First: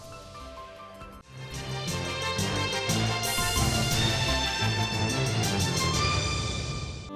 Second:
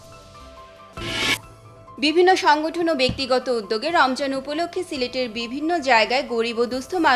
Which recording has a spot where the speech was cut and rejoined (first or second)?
second